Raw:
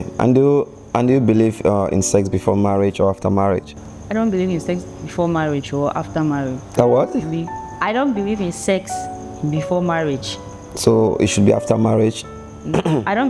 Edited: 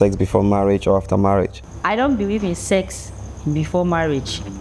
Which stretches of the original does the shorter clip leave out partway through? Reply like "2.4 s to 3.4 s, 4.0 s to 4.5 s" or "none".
3.8 s to 7.6 s